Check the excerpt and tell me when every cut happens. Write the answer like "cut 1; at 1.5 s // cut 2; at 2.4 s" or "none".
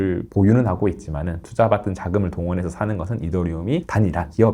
cut 1; at 1.4 s